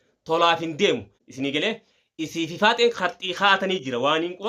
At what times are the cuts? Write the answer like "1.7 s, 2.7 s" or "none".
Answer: 1.2 s